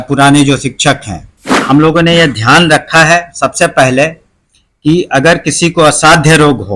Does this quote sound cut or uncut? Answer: cut